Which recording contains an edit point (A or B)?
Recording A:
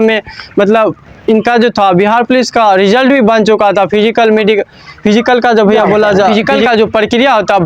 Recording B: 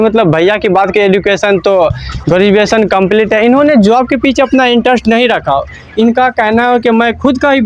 A